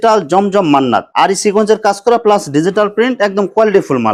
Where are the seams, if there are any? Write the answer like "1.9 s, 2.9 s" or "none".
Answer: none